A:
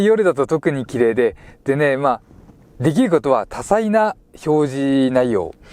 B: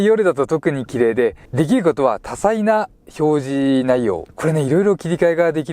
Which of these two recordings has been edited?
B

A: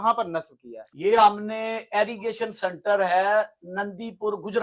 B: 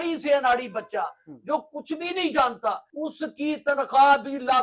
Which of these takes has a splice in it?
B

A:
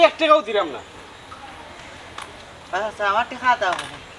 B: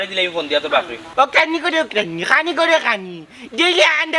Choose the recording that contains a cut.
B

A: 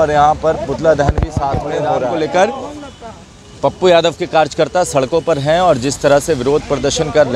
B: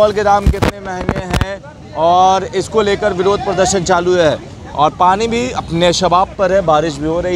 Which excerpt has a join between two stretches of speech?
A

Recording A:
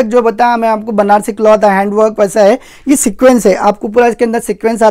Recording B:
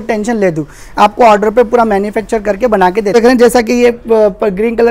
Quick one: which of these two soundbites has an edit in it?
B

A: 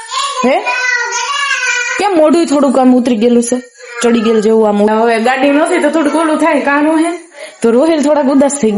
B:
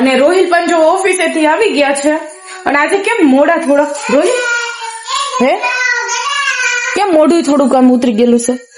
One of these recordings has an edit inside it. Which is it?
A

